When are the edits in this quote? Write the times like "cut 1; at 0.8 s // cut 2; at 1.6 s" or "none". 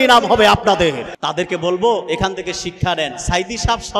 cut 1; at 1.1 s